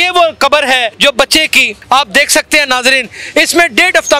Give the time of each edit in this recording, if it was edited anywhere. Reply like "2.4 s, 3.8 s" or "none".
1.0 s, 1.7 s